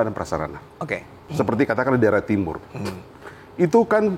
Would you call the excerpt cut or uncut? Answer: cut